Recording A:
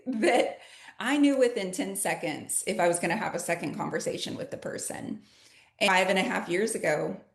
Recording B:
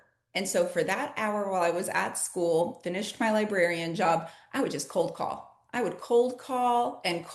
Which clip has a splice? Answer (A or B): A